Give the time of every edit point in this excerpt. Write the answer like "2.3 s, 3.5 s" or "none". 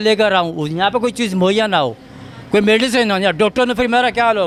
none